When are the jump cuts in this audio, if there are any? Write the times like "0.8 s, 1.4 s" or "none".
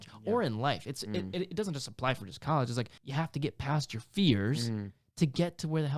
3.0 s